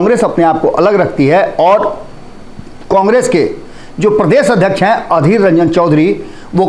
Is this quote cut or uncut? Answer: uncut